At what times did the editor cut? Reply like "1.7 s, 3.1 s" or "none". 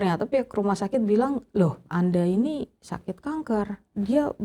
1.9 s